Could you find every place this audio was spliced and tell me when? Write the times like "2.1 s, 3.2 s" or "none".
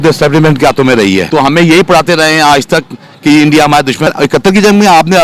1.3 s, 4.1 s